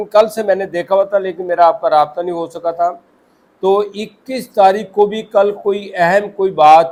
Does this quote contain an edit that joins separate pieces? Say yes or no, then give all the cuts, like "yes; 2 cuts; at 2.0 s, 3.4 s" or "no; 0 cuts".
no; 0 cuts